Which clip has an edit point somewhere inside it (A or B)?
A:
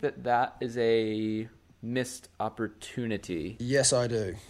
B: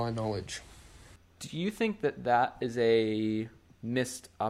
A